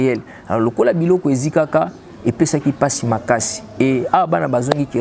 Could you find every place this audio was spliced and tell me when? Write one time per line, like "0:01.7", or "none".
none